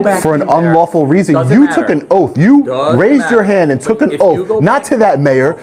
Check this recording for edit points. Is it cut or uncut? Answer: uncut